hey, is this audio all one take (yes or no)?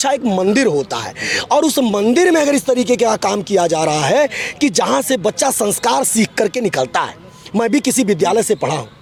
yes